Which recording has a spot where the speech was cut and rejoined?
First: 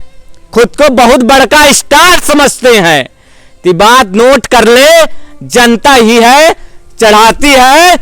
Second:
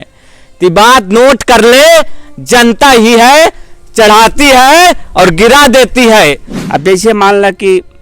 second; 1 cut; at 6.5 s

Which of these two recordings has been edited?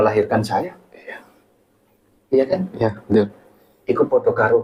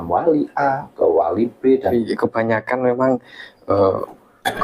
second; 1 cut; at 1.9 s

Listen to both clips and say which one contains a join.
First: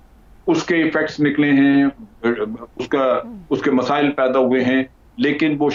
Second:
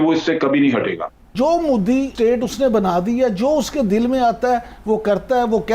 second; 1 cut; at 1.3 s

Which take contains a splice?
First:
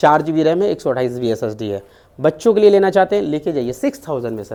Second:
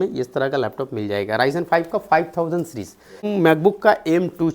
second; 1 cut; at 3.3 s

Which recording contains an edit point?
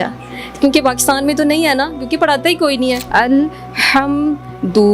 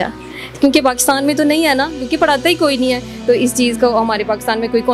first; 1 cut; at 3.0 s

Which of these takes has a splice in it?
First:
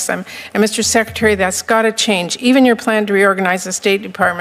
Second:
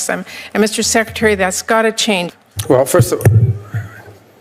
second; 1 cut; at 2.3 s

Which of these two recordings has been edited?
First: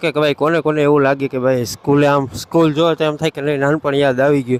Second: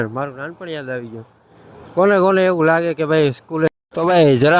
second; 1 cut; at 3.7 s

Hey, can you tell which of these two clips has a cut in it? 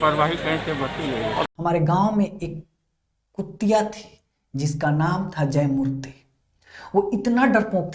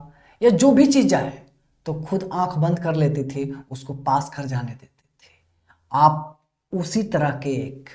first; 1 cut; at 1.5 s

